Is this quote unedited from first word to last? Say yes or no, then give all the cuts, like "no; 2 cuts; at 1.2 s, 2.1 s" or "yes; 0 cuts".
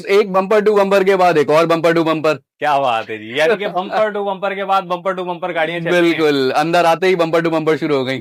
yes; 0 cuts